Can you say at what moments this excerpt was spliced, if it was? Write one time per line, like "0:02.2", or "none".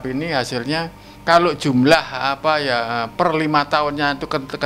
0:01.0